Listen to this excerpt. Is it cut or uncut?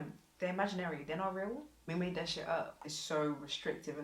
cut